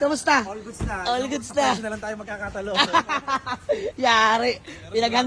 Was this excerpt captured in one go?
yes; 0 cuts

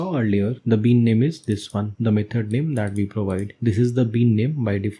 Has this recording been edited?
yes; 1 cut; at 1.9 s

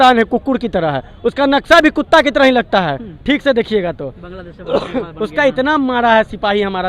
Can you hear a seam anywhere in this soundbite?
no; 0 cuts

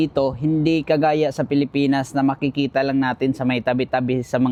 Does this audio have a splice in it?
no; 0 cuts

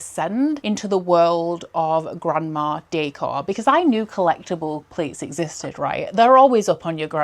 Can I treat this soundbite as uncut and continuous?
yes; 0 cuts

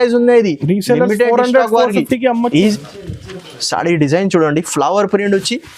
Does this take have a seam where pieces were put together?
yes; 1 cut; at 2.5 s

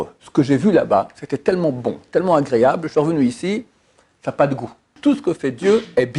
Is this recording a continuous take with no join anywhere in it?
no; 1 cut; at 5.0 s

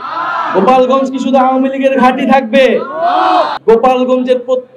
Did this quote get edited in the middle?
yes; 1 cut; at 3.5 s

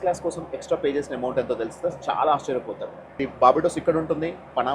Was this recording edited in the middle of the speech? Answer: yes; 1 cut; at 3.0 s

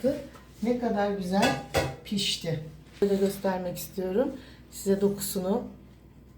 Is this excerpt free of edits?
no; 1 cut; at 3.0 s

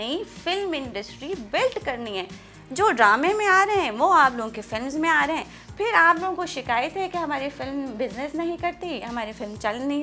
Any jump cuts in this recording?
no; 0 cuts

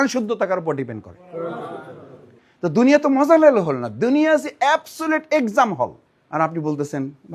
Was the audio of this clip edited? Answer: yes; 2 cuts; at 2.3 s, 6.0 s

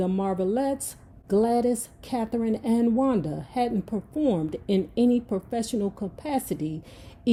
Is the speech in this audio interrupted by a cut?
no; 0 cuts

